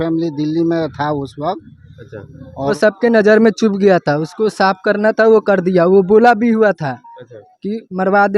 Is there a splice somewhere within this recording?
yes; 1 cut; at 2.7 s

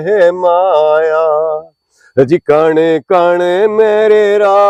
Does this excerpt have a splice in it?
no; 0 cuts

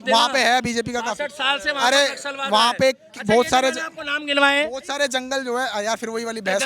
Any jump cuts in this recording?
no; 0 cuts

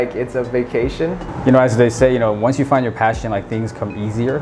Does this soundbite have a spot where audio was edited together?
yes; 1 cut; at 1.3 s

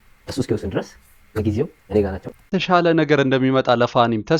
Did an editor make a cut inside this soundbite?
no; 0 cuts

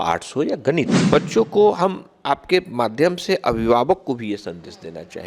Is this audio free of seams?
no; 1 cut; at 1.0 s

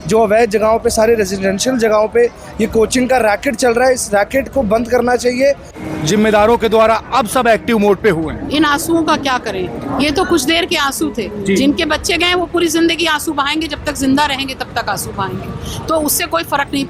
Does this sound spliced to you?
yes; 1 cut; at 5.7 s

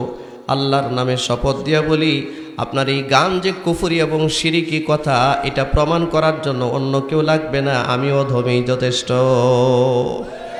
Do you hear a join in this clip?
no; 0 cuts

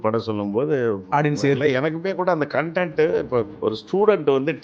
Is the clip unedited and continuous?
no; 1 cut; at 3.5 s

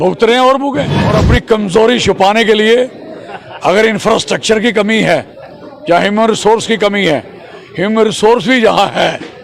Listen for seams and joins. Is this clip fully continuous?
no; 1 cut; at 1.1 s

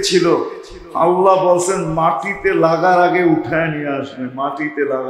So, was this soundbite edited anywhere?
no; 0 cuts

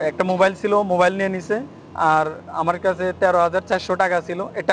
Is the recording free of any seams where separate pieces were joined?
yes; 0 cuts

